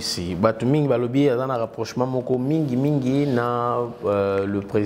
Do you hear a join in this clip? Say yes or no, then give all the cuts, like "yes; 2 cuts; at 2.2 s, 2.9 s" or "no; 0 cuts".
no; 0 cuts